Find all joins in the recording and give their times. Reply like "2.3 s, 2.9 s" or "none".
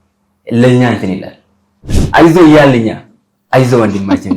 2.0 s